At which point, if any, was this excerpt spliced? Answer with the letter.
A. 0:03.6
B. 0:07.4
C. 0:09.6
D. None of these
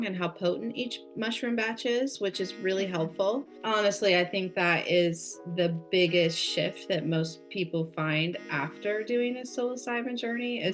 A